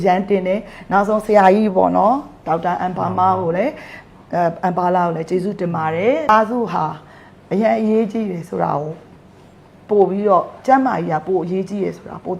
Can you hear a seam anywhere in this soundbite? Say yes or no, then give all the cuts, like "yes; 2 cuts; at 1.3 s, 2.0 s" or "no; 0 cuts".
yes; 1 cut; at 6.3 s